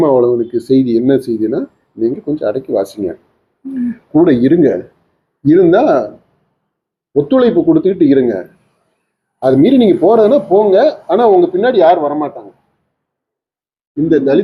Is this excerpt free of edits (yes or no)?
yes